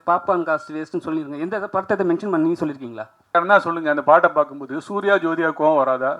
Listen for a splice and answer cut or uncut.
cut